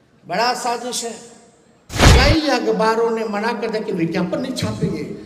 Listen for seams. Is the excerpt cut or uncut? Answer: cut